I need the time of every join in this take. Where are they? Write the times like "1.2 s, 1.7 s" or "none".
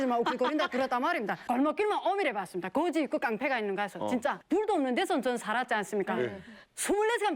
1.4 s, 4.4 s